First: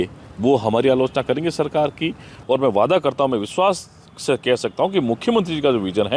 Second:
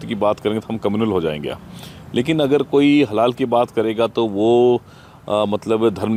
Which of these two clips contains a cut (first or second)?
first